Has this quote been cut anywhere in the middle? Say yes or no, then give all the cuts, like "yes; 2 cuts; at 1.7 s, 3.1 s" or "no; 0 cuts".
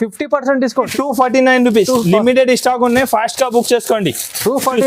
yes; 1 cut; at 0.9 s